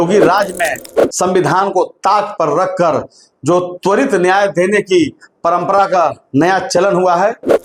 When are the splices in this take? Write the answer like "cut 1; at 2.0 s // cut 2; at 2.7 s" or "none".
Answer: none